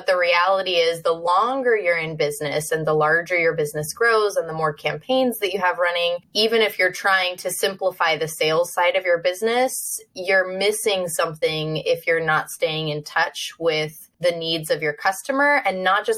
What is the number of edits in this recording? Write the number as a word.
two